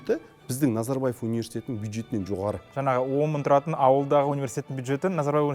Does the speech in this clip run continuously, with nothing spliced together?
no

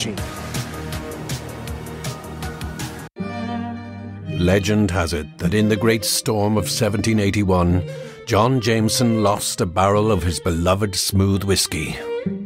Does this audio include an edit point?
yes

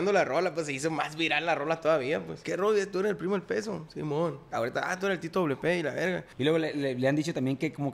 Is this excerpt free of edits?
no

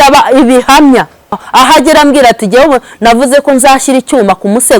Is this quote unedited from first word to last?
no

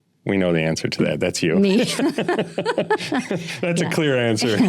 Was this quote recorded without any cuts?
yes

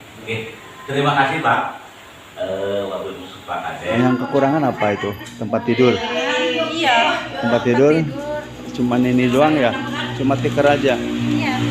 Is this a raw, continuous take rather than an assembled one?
no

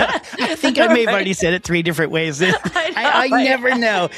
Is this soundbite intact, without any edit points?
yes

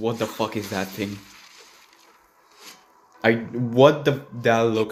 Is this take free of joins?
yes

